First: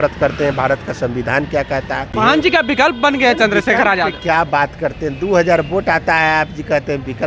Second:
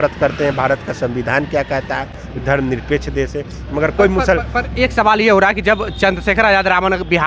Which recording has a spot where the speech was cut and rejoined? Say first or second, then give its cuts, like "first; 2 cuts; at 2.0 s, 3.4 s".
first; 1 cut; at 2.1 s